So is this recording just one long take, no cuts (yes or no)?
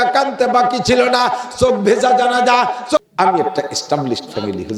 no